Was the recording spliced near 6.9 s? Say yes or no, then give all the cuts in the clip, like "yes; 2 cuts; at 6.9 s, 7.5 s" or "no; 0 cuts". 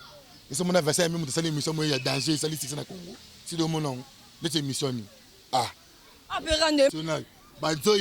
yes; 1 cut; at 6.9 s